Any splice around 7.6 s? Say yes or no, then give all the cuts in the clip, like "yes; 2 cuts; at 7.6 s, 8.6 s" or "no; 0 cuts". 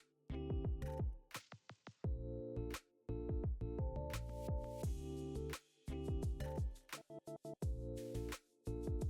yes; 1 cut; at 7.6 s